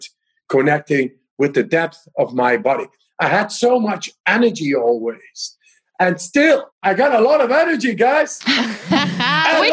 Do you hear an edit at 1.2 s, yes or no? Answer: no